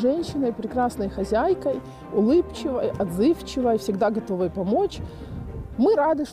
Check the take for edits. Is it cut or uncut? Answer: uncut